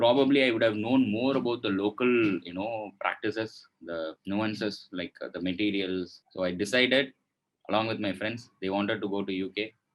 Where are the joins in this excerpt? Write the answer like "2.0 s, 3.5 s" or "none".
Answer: 6.2 s